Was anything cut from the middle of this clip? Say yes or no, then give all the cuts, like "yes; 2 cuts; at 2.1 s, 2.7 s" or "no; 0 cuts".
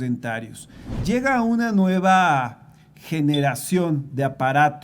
yes; 1 cut; at 1.0 s